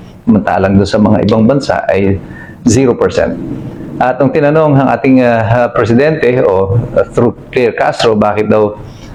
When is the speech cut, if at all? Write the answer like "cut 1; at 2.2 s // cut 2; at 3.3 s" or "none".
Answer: none